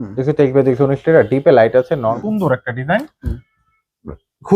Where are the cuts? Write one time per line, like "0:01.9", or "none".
0:02.1

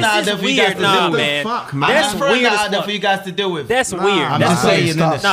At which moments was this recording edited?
none

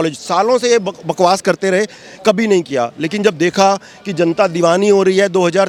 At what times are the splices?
none

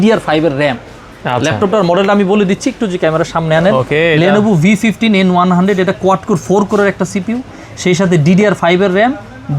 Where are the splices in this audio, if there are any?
none

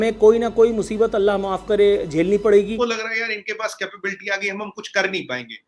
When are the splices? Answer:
0:02.7

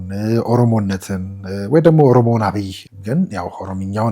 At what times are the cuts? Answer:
0:02.9

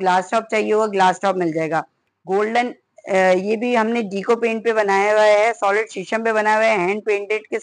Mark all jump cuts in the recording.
0:02.1

